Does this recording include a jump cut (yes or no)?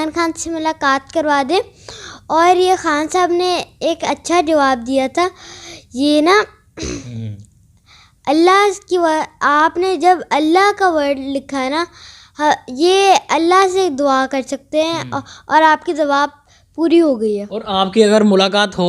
no